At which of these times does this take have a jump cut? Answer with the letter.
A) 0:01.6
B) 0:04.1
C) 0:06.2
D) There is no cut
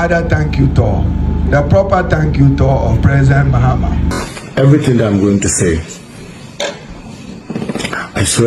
B